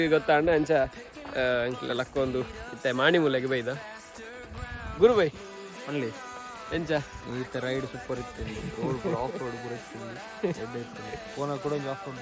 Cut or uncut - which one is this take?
uncut